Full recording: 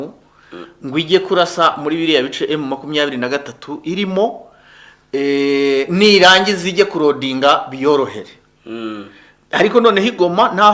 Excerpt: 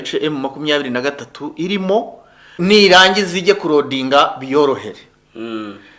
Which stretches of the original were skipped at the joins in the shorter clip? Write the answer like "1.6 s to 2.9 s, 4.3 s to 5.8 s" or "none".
4.8 s to 5.9 s